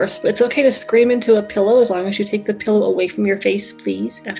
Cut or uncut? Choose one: uncut